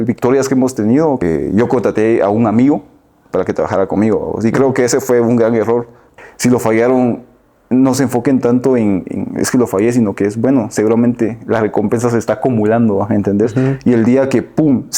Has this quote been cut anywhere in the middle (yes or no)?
yes